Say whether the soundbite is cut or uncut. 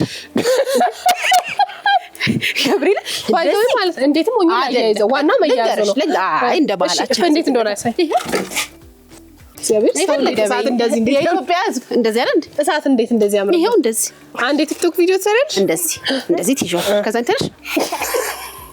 cut